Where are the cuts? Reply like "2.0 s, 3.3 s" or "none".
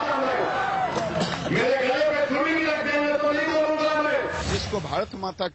4.5 s